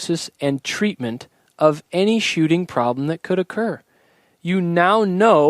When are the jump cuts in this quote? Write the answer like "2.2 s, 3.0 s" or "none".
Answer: none